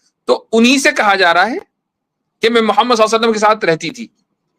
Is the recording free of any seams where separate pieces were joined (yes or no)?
yes